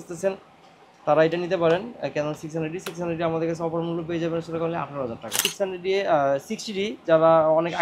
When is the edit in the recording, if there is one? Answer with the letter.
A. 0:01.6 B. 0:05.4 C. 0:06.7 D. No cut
B